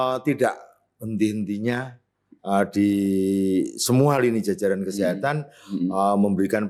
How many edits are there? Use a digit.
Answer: 0